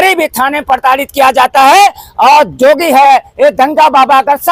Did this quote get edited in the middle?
no; 0 cuts

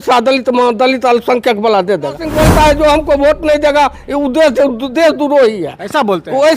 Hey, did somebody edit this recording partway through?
yes; 1 cut; at 2.3 s

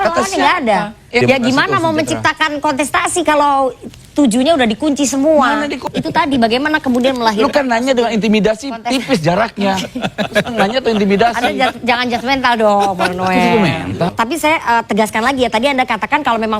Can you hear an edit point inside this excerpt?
yes; 3 cuts; at 1.2 s, 5.8 s, 14.1 s

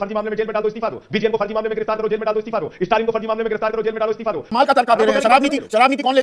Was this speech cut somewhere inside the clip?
yes; 1 cut; at 4.5 s

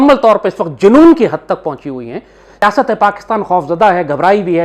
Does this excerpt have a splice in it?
yes; 1 cut; at 2.6 s

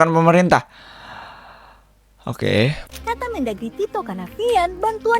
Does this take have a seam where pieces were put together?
yes; 1 cut; at 2.8 s

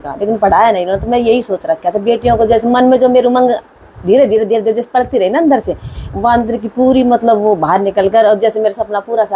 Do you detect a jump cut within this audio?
no; 0 cuts

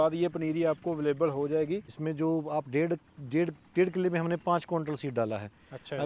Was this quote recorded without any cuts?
no; 1 cut; at 2.0 s

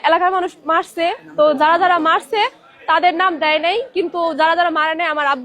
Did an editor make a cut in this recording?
no; 0 cuts

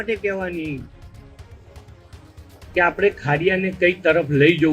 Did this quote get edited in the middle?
no; 0 cuts

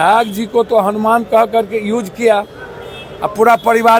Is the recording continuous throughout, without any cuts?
yes; 0 cuts

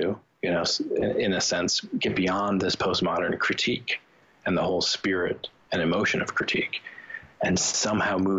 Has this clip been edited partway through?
no; 0 cuts

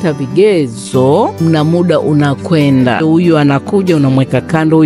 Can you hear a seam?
yes; 2 cuts; at 1.4 s, 3.0 s

